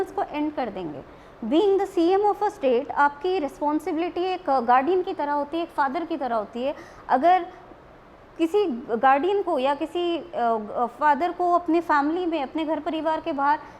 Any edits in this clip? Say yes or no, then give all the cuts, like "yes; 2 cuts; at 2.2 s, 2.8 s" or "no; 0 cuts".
no; 0 cuts